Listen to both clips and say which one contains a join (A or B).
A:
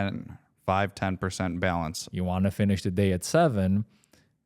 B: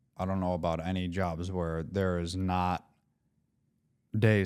A